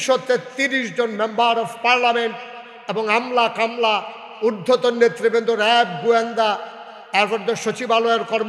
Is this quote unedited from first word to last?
yes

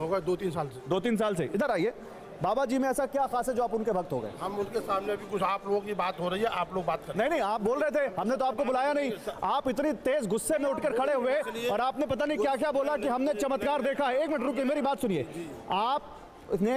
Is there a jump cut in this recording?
no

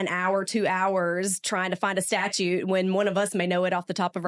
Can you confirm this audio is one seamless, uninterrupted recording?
yes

